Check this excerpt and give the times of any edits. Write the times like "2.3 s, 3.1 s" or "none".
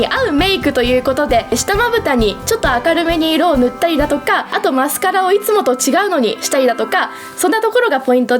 1.5 s, 2.4 s, 4.5 s